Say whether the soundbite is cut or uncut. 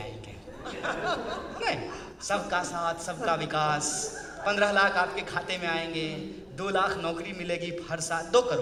uncut